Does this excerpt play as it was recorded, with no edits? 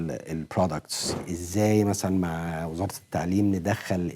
no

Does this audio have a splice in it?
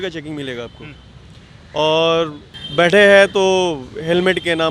no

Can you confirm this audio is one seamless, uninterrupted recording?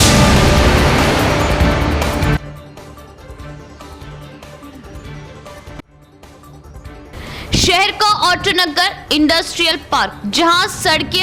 yes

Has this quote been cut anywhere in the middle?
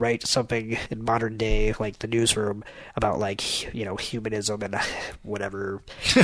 yes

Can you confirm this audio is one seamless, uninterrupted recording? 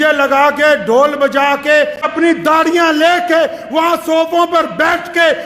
no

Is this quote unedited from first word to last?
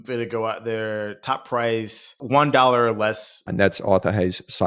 no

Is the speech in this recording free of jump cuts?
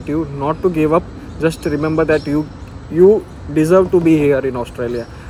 yes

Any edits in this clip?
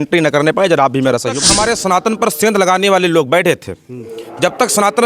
yes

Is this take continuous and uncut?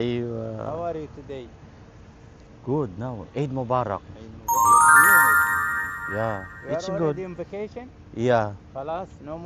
yes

